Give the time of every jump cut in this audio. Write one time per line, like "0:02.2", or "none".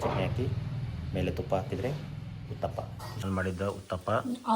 0:03.2